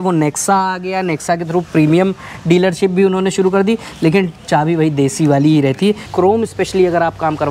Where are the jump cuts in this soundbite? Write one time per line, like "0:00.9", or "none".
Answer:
0:06.1